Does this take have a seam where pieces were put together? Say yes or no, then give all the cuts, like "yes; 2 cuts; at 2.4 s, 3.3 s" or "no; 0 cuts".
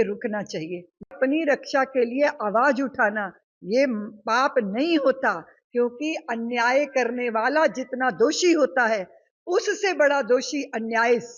yes; 1 cut; at 1.1 s